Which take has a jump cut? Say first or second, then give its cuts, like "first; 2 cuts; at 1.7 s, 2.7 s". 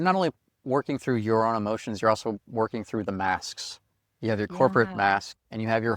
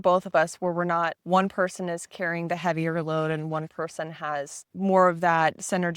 second; 2 cuts; at 1.2 s, 4.6 s